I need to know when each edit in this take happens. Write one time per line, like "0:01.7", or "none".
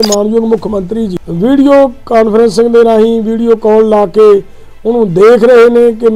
0:01.2